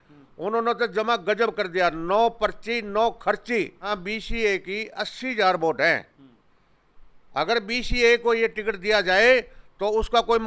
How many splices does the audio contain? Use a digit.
1